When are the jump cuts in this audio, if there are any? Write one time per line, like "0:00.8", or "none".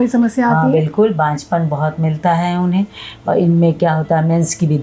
0:03.1